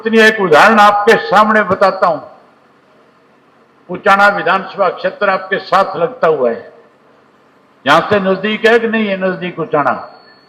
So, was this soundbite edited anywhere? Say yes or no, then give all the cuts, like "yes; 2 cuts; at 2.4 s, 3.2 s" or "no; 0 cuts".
no; 0 cuts